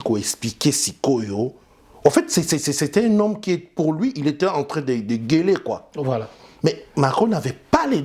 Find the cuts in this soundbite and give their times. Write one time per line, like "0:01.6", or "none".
none